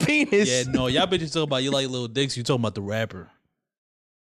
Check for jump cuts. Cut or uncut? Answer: uncut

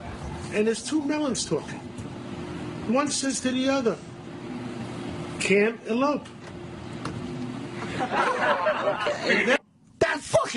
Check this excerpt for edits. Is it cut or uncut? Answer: cut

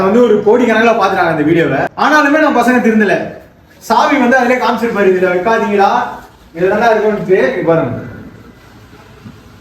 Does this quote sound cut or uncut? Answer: cut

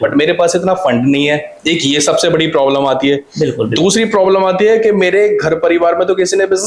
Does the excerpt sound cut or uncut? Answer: uncut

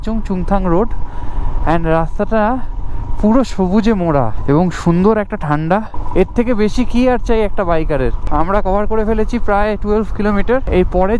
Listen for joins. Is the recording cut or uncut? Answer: uncut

